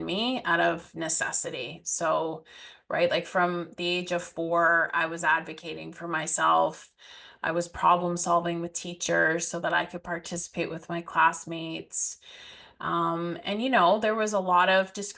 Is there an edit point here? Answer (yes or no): no